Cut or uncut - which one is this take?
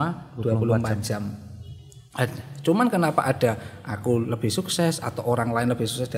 uncut